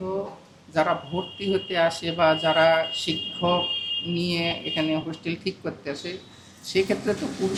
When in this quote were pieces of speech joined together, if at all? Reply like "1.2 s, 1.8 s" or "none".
none